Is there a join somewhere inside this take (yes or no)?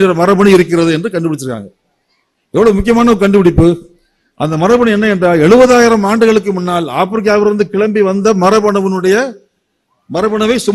no